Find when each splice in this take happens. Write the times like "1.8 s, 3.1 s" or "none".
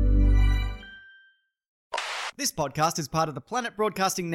2.1 s